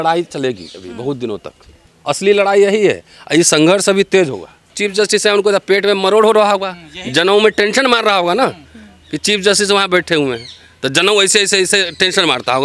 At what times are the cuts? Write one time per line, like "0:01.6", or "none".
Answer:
0:01.9
0:04.7